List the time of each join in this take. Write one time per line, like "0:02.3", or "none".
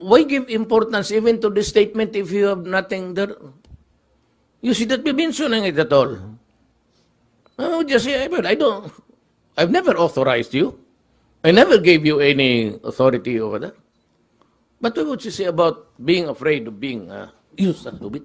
0:04.6